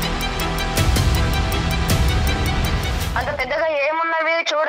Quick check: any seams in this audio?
no; 0 cuts

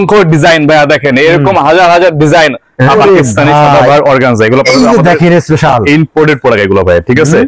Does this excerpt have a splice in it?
yes; 1 cut; at 2.9 s

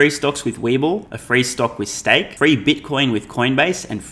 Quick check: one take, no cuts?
no; 2 cuts; at 1.1 s, 2.3 s

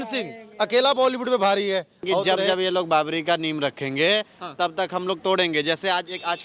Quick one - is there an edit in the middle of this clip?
yes; 1 cut; at 2.2 s

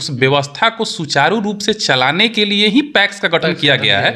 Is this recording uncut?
yes; 0 cuts

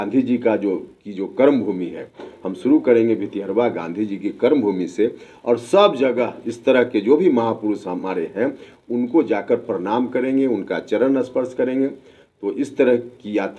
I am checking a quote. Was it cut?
no; 0 cuts

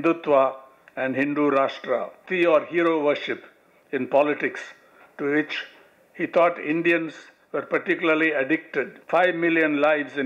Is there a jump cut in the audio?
yes; 2 cuts; at 2.2 s, 9.0 s

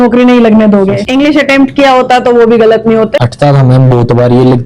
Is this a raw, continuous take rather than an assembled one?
no; 2 cuts; at 1.0 s, 3.2 s

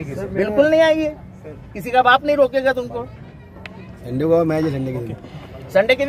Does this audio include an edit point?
no; 0 cuts

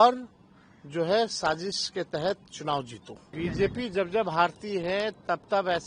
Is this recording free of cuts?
no; 1 cut; at 3.2 s

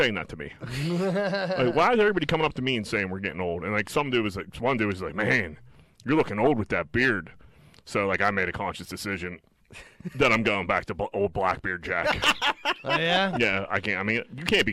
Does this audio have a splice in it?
no; 0 cuts

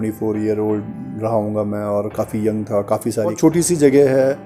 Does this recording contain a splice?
yes; 1 cut; at 3.4 s

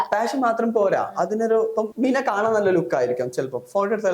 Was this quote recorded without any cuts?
no; 1 cut; at 1.9 s

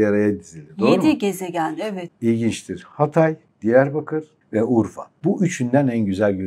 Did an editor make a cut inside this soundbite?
yes; 4 cuts; at 2.0 s, 3.5 s, 4.4 s, 5.0 s

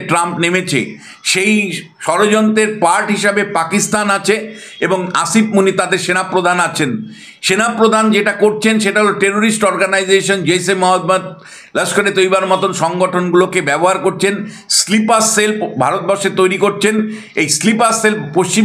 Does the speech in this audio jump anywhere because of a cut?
no; 0 cuts

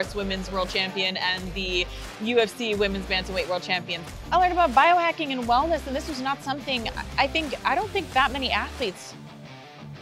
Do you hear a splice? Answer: yes; 1 cut; at 3.9 s

